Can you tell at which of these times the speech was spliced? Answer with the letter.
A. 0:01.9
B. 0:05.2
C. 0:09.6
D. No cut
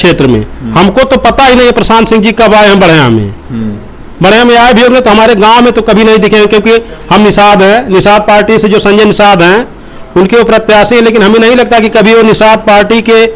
D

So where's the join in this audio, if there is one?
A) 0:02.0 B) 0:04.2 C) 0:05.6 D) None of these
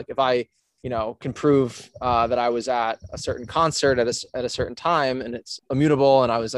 C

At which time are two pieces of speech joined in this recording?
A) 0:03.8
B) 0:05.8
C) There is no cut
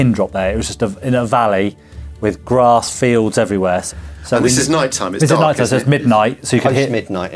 C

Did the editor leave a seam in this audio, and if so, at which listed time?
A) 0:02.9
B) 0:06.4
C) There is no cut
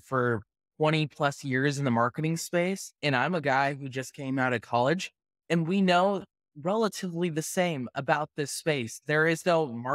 A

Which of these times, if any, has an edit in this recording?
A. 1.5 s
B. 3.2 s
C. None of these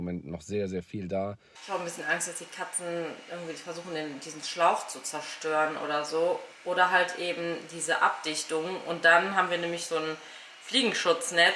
A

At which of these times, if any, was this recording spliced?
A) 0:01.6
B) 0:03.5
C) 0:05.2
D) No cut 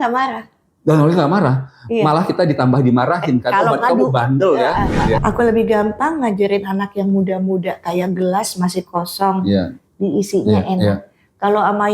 C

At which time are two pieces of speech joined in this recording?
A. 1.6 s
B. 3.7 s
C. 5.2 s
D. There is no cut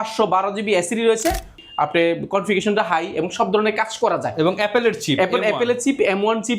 A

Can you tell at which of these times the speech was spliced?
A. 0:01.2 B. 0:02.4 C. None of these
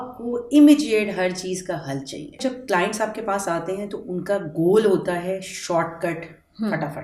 B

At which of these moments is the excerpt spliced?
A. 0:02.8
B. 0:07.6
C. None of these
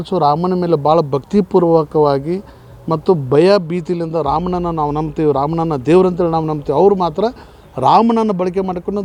C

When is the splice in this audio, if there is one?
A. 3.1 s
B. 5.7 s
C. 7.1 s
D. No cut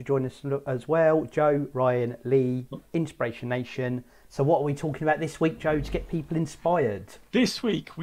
C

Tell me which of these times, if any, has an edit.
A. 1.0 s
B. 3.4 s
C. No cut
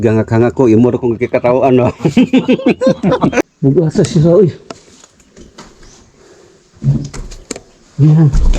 B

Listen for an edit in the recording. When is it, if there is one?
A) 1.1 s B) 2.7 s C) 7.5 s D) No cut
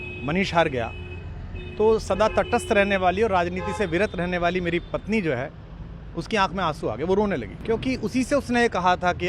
C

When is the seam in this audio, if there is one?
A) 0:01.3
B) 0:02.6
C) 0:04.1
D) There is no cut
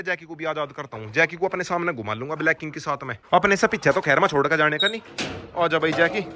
D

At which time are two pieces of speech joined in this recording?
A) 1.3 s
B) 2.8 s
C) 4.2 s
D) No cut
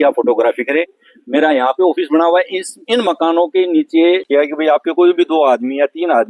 C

